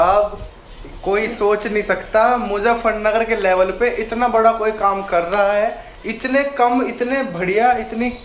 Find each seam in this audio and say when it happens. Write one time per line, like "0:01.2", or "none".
none